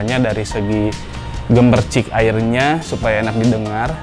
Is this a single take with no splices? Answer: yes; 0 cuts

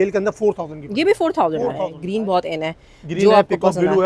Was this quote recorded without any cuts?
no; 1 cut; at 1.9 s

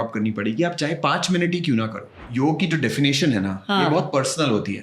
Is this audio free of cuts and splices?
no; 1 cut; at 2.2 s

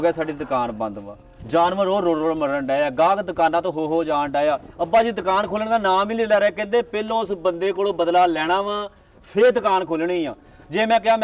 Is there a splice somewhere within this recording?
no; 0 cuts

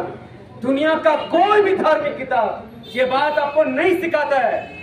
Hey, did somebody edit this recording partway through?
no; 0 cuts

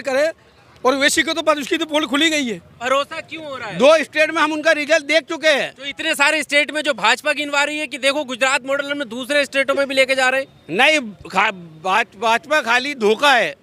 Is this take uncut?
no; 1 cut; at 2.8 s

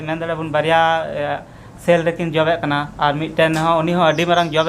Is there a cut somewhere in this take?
no; 0 cuts

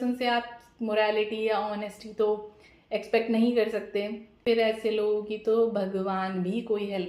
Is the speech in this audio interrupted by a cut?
yes; 1 cut; at 4.4 s

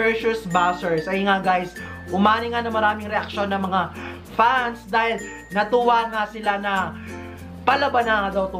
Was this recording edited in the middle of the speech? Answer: no; 0 cuts

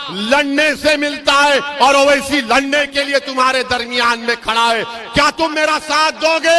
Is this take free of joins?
yes; 0 cuts

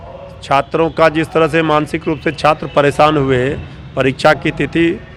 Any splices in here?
no; 0 cuts

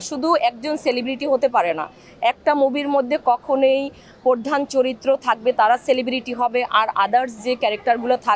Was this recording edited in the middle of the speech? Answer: no; 0 cuts

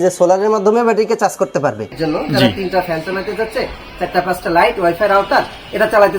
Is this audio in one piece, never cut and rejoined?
no; 1 cut; at 2.0 s

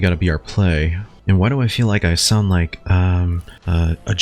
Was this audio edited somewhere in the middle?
no; 0 cuts

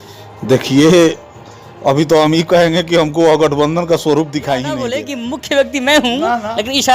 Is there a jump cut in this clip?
yes; 1 cut; at 5.0 s

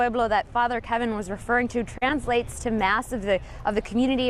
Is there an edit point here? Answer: no; 0 cuts

